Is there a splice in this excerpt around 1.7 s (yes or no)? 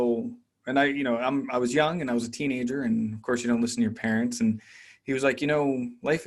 no